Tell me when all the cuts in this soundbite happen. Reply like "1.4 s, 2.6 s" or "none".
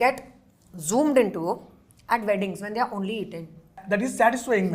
3.8 s